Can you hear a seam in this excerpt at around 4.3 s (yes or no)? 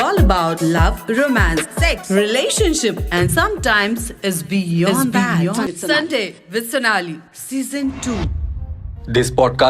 no